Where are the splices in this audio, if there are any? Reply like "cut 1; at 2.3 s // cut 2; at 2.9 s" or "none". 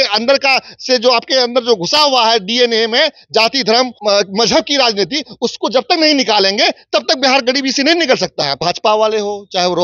cut 1; at 3.9 s // cut 2; at 8.6 s